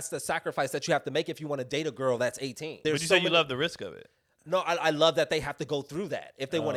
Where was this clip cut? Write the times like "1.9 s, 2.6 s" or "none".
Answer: none